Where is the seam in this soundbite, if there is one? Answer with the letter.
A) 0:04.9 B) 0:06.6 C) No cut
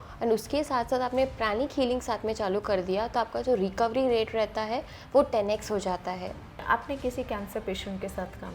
B